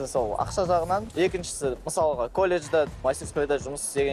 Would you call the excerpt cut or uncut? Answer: cut